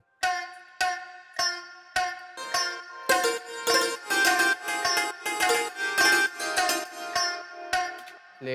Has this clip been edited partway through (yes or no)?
no